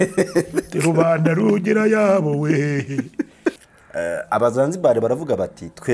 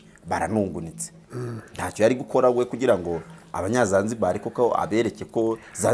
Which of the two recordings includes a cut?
first; 1 cut; at 3.6 s

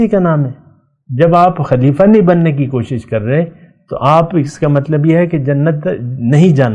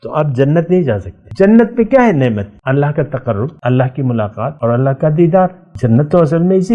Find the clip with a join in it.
second; 5 cuts; at 1.2 s, 2.5 s, 3.5 s, 4.5 s, 5.7 s

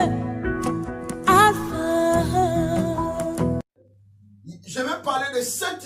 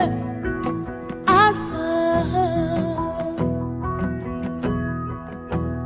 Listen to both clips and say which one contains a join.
first; 1 cut; at 3.6 s

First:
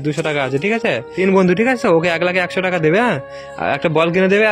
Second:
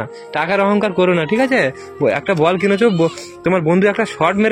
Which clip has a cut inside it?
first; 1 cut; at 1.1 s

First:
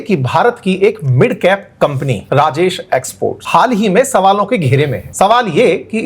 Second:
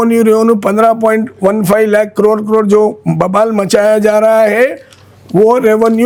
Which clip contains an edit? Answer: first; 3 cuts; at 2.2 s, 3.4 s, 5.0 s

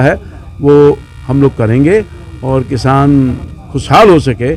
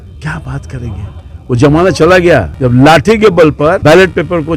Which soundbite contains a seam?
second; 2 cuts; at 2.5 s, 3.8 s

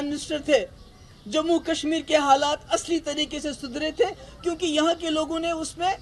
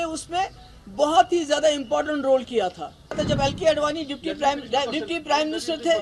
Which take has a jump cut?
second; 1 cut; at 3.2 s

